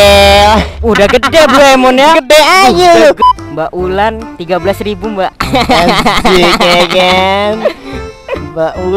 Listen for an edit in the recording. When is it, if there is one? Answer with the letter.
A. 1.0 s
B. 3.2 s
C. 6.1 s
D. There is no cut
B